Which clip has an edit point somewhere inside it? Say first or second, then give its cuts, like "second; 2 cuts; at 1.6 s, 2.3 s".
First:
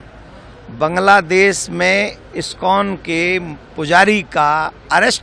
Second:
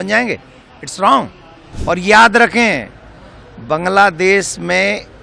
second; 1 cut; at 1.7 s